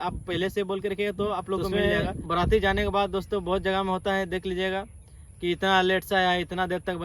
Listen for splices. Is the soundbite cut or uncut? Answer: cut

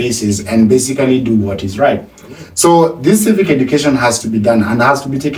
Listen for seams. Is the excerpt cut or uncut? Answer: uncut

